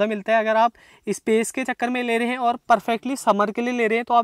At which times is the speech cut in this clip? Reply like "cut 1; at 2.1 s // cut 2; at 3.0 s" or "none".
none